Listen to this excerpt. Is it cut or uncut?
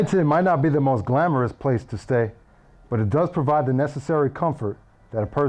uncut